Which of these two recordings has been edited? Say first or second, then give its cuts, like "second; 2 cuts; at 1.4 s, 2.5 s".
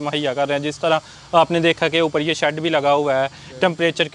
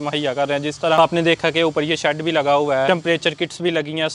second; 2 cuts; at 1.0 s, 2.9 s